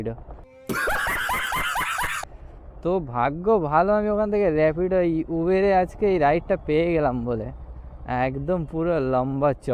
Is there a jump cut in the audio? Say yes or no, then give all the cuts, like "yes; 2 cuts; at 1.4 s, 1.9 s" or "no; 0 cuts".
no; 0 cuts